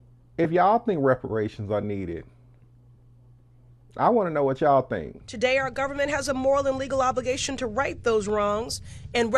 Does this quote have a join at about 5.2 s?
yes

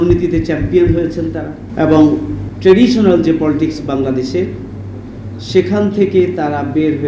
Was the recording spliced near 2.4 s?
yes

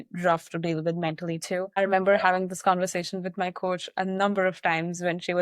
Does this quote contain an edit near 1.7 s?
yes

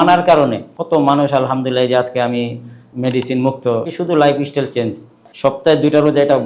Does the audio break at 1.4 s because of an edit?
no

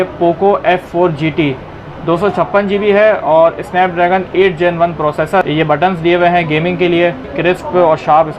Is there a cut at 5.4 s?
yes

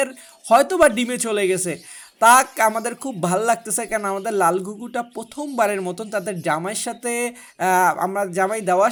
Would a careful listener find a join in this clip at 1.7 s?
no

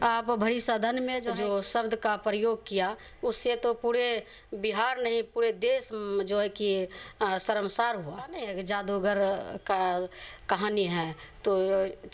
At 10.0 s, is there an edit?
no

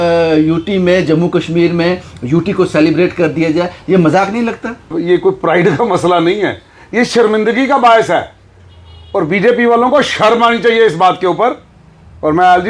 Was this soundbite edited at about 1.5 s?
no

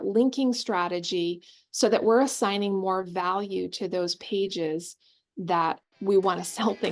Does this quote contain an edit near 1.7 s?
no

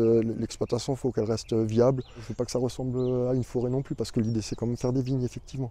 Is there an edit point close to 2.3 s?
yes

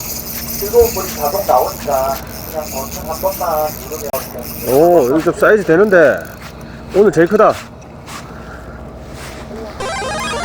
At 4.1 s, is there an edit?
yes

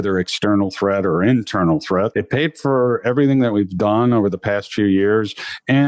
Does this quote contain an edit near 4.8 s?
no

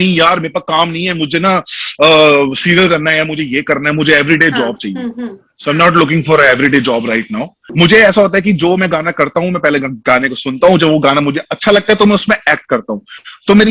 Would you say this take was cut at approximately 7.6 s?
yes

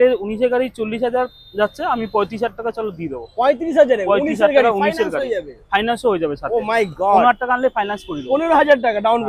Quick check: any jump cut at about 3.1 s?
no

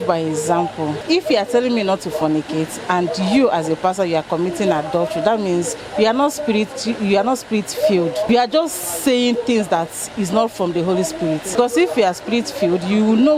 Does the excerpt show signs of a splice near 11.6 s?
yes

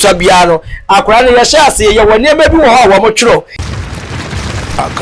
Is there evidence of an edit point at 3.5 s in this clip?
yes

